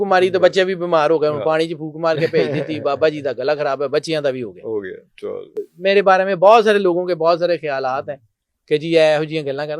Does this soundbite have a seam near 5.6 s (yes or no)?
yes